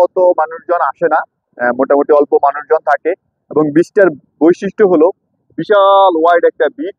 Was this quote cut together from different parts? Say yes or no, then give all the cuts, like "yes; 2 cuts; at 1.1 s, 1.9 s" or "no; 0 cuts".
no; 0 cuts